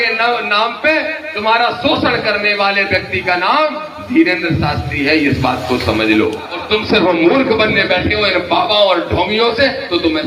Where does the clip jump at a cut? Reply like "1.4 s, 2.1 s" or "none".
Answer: 6.5 s